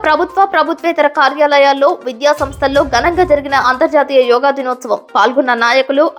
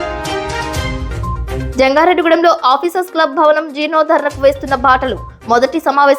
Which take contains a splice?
second; 1 cut; at 1.3 s

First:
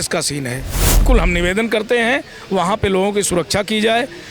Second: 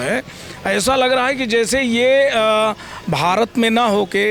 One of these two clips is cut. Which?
first; 1 cut; at 1.0 s

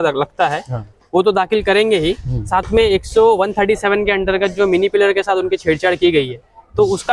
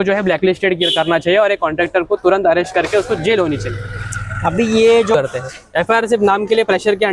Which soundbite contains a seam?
second; 1 cut; at 5.1 s

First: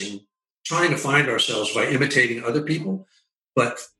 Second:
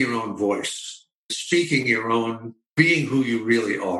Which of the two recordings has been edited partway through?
second; 2 cuts; at 1.3 s, 2.7 s

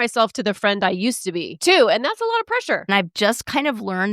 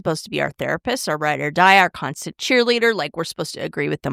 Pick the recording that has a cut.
first; 2 cuts; at 1.5 s, 2.9 s

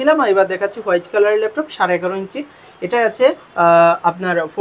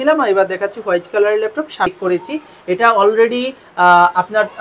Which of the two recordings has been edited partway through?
second; 1 cut; at 1.9 s

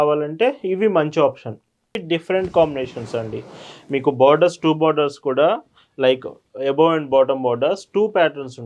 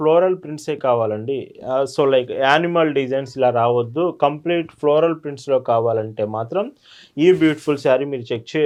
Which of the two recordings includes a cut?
first; 1 cut; at 2.0 s

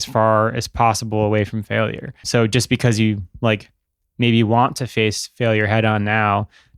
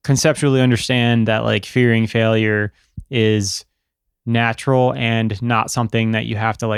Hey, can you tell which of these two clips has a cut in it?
first; 1 cut; at 2.1 s

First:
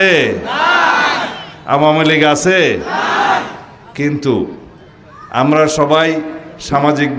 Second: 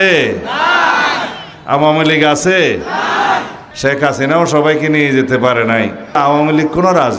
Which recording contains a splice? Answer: second; 2 cuts; at 3.6 s, 6.2 s

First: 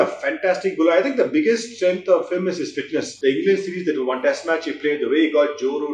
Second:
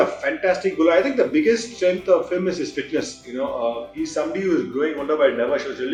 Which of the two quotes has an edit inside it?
first; 1 cut; at 3.1 s

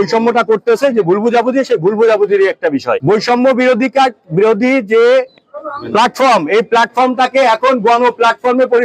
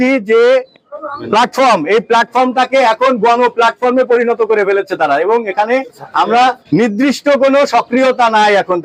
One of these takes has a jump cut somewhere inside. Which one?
first; 1 cut; at 3.0 s

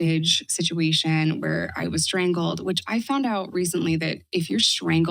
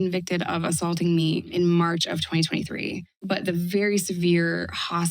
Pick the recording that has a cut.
second; 1 cut; at 1.5 s

